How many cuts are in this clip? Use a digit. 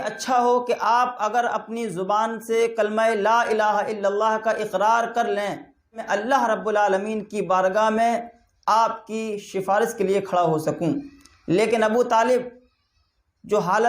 1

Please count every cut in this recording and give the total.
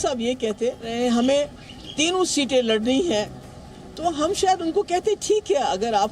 1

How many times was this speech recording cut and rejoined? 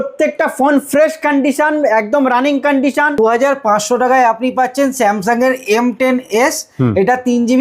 1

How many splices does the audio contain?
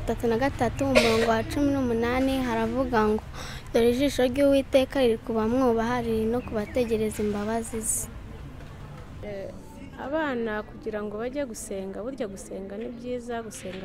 1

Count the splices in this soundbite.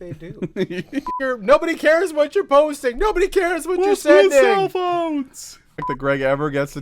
2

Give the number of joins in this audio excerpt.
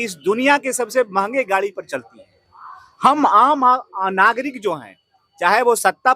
0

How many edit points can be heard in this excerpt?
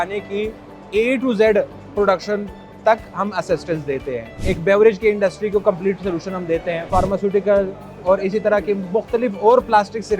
2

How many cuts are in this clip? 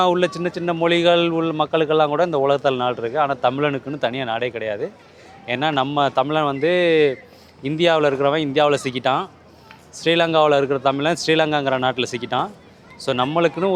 0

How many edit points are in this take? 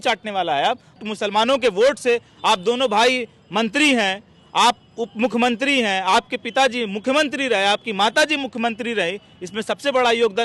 1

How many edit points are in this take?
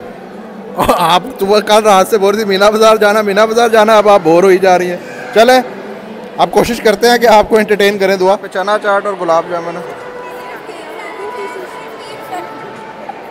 0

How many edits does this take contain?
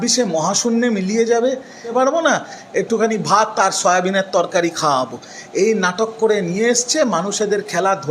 1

